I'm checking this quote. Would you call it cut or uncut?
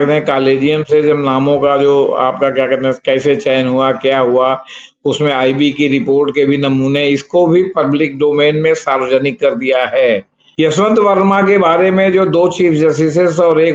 cut